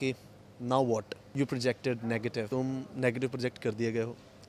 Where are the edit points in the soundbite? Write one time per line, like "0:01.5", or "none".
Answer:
0:01.2
0:02.5